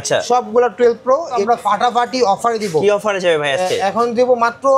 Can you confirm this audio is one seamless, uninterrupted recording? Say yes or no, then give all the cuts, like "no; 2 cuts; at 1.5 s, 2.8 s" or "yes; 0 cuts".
no; 1 cut; at 1.3 s